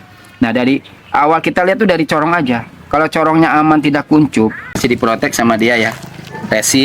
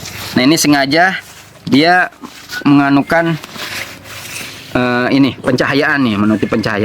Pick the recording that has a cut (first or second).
first